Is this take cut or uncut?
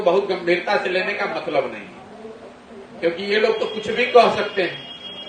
uncut